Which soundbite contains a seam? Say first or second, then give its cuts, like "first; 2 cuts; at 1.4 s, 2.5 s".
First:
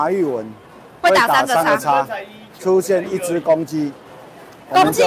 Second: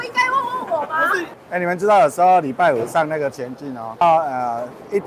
second; 2 cuts; at 1.4 s, 4.0 s